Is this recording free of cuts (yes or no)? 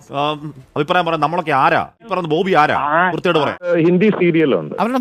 no